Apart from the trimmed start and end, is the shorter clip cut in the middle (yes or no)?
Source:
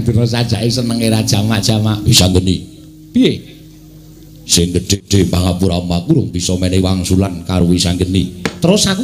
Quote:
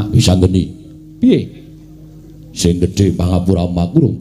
yes